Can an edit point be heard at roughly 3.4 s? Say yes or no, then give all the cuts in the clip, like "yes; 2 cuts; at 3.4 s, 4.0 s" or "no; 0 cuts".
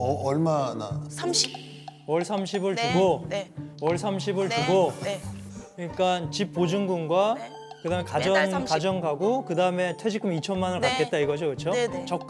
no; 0 cuts